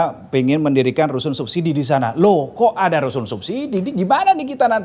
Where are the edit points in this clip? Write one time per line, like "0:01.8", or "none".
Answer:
none